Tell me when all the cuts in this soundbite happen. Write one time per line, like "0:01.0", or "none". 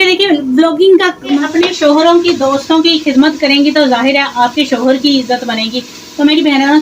0:01.4